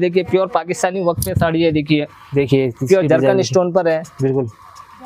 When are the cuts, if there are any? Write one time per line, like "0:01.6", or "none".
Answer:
none